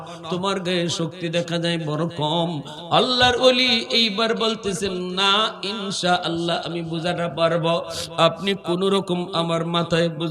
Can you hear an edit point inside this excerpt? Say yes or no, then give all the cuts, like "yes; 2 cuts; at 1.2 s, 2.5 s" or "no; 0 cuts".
yes; 1 cut; at 2.7 s